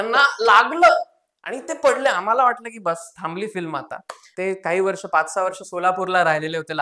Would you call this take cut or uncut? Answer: cut